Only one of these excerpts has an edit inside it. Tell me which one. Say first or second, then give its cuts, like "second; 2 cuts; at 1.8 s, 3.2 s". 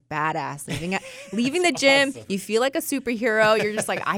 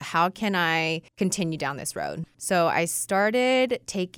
second; 2 cuts; at 1.1 s, 2.2 s